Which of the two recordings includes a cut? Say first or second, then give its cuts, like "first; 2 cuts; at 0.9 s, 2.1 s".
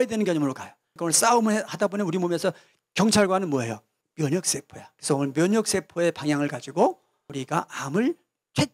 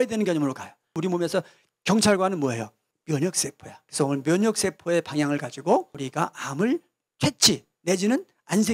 second; 2 cuts; at 1.0 s, 6.0 s